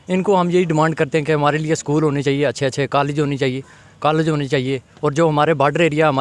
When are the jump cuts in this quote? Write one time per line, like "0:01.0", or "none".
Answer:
none

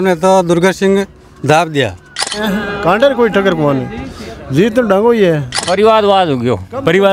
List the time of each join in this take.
0:02.3
0:05.6

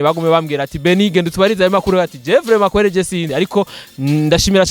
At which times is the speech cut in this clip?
0:03.2

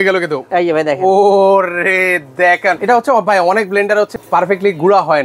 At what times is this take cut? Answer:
0:02.8
0:04.2

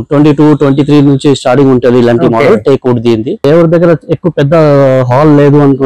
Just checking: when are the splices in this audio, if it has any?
0:03.4

